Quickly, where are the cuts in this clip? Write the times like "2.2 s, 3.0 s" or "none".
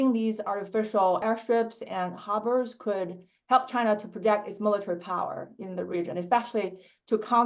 1.2 s